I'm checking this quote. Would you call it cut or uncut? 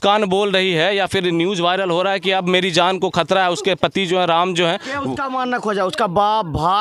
uncut